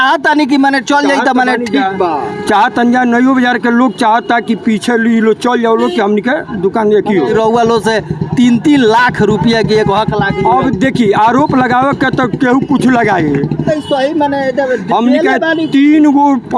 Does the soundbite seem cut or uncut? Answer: cut